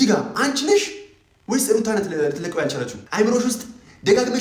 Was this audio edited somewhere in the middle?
yes; 1 cut; at 3.0 s

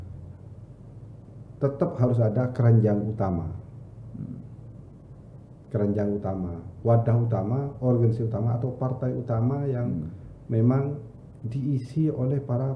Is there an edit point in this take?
no; 0 cuts

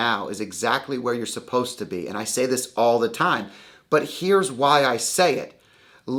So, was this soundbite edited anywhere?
no; 0 cuts

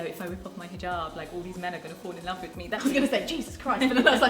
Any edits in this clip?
yes; 1 cut; at 2.8 s

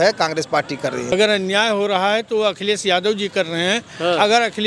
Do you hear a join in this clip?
yes; 1 cut; at 1.1 s

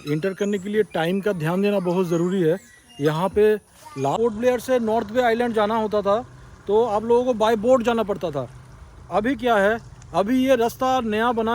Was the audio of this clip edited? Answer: yes; 1 cut; at 4.1 s

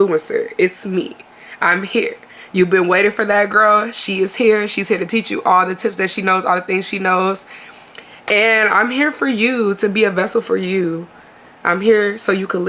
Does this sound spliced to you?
no; 0 cuts

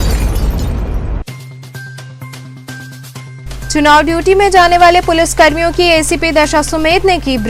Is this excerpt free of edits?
no; 1 cut; at 3.2 s

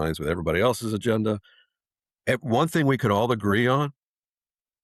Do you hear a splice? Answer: no; 0 cuts

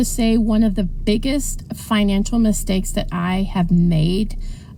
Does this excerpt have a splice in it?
no; 0 cuts

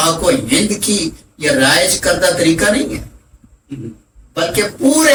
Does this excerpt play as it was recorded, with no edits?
yes; 0 cuts

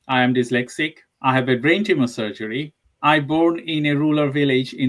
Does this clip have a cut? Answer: no; 0 cuts

